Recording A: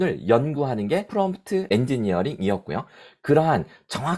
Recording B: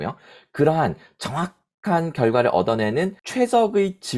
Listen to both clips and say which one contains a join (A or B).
A